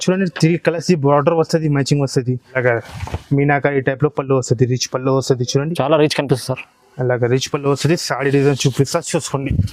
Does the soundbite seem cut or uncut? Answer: cut